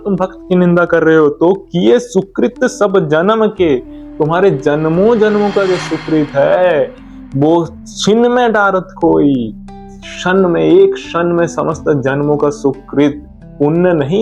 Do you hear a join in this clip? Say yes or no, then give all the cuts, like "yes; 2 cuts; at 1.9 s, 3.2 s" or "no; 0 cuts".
no; 0 cuts